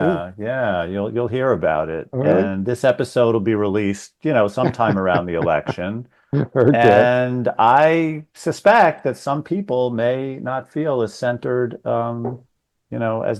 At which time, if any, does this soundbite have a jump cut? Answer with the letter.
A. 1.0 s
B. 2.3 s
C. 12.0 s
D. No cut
D